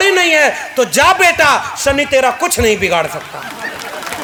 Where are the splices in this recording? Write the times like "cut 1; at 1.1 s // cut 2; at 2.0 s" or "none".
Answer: none